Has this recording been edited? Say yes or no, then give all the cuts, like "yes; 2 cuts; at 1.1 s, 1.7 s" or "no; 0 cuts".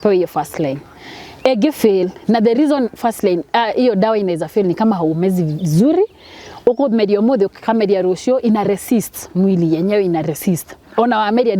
no; 0 cuts